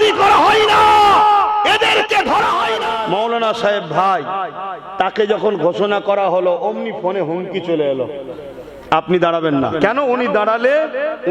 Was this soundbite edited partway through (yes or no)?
yes